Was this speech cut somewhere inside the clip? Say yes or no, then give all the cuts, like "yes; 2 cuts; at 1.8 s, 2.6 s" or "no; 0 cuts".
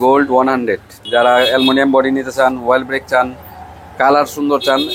yes; 1 cut; at 1.0 s